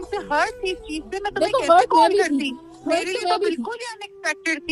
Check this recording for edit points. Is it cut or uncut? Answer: uncut